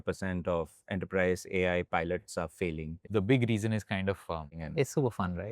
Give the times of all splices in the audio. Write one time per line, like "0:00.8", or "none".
0:03.0
0:04.6